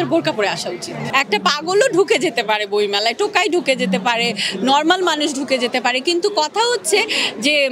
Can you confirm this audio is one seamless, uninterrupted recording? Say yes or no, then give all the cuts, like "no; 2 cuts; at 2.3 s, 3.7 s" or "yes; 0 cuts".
no; 1 cut; at 1.0 s